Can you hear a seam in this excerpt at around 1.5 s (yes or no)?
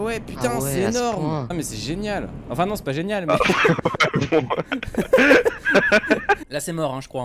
yes